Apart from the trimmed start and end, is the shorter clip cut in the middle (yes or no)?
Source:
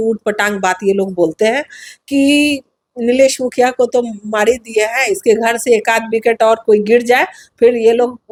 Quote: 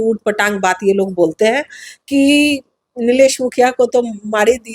no